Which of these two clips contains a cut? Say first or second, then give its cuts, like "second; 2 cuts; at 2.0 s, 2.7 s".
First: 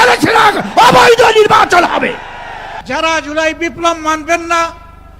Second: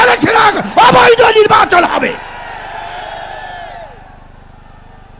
first; 1 cut; at 2.7 s